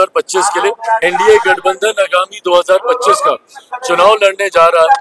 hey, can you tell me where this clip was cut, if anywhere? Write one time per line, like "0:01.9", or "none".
0:01.0